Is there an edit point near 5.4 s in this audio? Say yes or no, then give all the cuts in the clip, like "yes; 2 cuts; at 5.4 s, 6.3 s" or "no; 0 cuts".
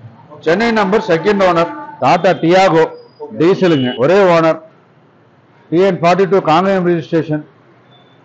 no; 2 cuts; at 1.8 s, 3.9 s